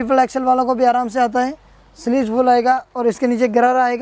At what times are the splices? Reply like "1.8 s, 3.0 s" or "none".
none